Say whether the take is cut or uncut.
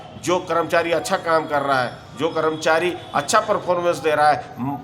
uncut